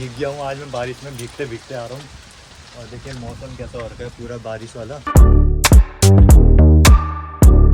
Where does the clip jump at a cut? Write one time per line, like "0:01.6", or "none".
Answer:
none

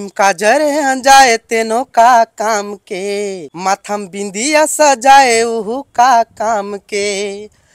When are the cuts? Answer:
0:03.5

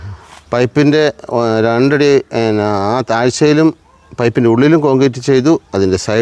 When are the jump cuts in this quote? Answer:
none

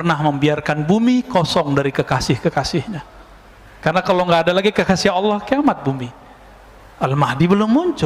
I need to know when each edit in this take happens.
none

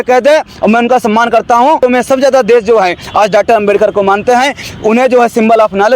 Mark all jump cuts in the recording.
0:01.8

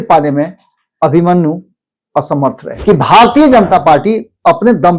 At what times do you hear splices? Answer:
0:02.7

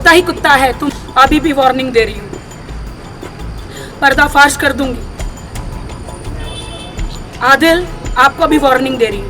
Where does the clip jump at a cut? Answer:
0:01.0

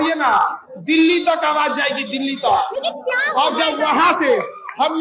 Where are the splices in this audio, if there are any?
none

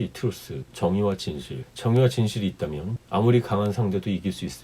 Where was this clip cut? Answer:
none

